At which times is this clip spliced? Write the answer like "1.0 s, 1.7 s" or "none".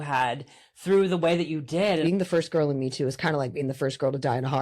2.0 s